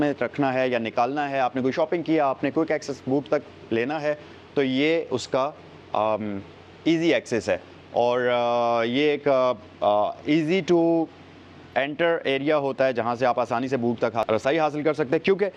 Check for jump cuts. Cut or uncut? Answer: uncut